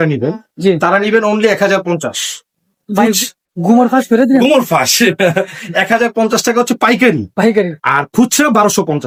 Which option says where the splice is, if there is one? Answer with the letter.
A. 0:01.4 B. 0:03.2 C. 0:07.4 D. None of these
D